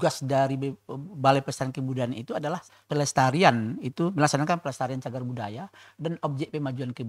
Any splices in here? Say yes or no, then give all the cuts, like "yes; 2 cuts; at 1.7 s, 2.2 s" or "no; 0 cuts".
yes; 1 cut; at 2.8 s